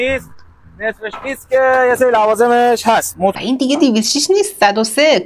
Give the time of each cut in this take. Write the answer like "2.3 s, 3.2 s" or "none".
3.3 s

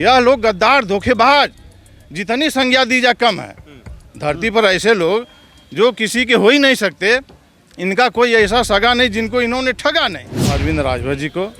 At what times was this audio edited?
10.5 s

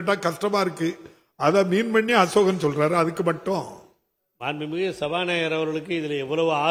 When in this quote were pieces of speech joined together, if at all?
none

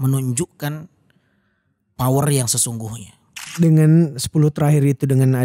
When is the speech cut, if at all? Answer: 3.4 s

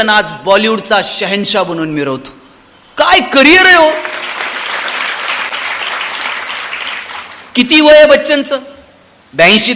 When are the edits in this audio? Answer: none

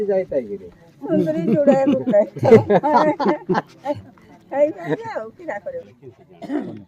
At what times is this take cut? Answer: 5.8 s

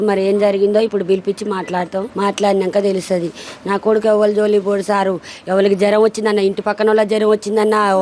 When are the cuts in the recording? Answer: 2.1 s

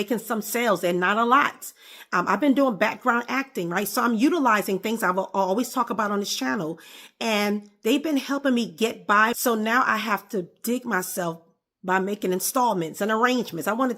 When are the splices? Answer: 9.4 s

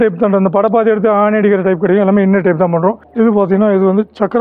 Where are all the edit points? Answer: 3.0 s

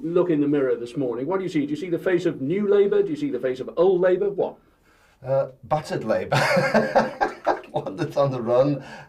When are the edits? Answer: none

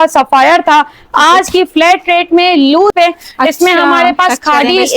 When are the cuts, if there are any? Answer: 2.9 s

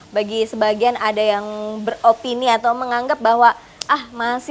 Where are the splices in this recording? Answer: none

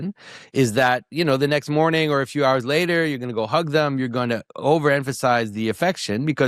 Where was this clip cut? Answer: none

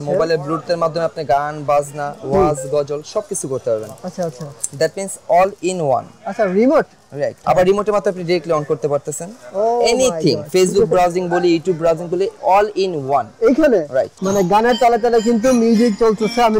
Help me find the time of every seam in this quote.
7.4 s, 14.2 s

